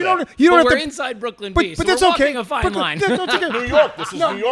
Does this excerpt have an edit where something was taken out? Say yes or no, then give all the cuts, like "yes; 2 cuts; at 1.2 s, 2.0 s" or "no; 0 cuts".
no; 0 cuts